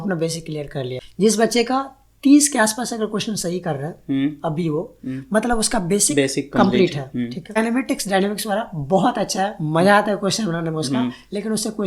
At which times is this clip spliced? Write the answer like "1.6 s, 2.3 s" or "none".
1.0 s, 7.6 s

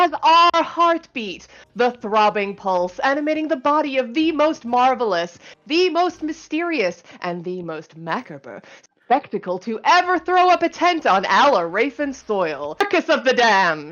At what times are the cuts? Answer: 12.8 s

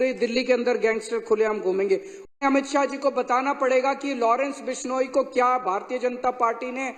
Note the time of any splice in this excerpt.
2.3 s

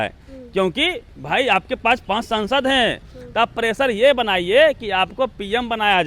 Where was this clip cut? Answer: 3.1 s

